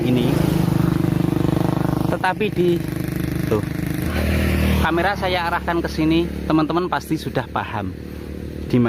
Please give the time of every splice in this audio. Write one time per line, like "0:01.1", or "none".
none